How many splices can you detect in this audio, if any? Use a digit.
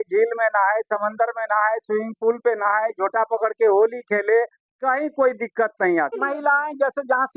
1